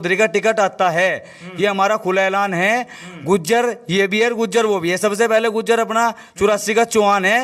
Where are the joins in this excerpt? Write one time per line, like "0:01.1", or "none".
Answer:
none